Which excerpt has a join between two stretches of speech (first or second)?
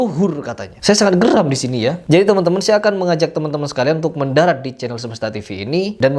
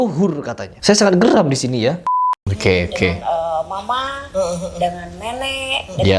second